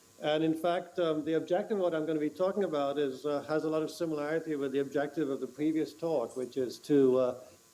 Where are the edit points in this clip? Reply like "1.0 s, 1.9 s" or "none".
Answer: 2.1 s